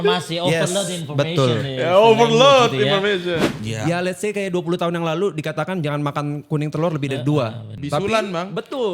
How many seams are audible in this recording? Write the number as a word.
two